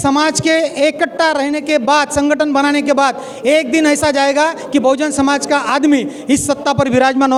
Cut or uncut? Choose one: uncut